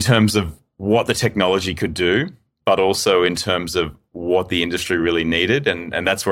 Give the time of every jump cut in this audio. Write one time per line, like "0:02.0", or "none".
none